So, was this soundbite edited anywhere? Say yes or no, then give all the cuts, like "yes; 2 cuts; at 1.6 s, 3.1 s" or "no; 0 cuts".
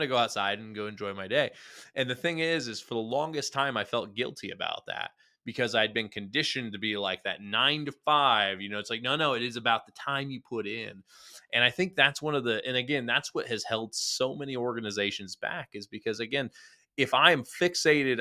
no; 0 cuts